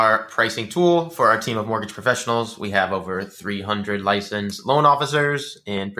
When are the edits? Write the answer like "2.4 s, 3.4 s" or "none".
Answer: none